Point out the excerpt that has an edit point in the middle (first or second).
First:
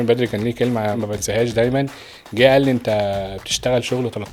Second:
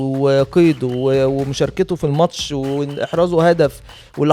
first